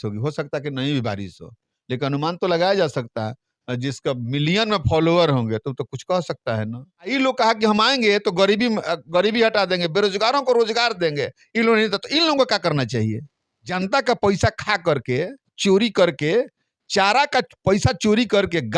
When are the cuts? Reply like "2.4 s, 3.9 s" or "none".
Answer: 7.1 s, 13.7 s

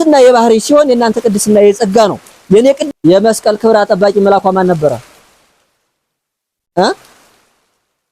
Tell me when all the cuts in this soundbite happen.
2.8 s

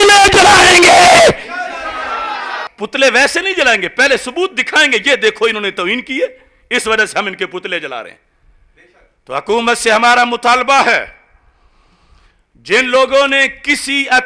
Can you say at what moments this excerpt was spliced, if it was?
none

